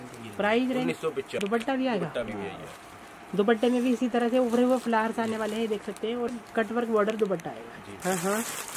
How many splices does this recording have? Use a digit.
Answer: 3